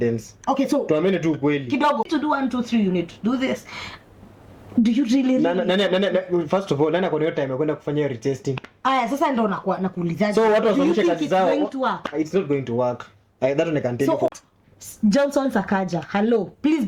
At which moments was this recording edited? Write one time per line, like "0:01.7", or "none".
0:02.1
0:14.3